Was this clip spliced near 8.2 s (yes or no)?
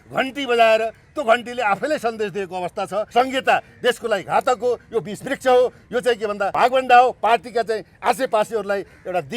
no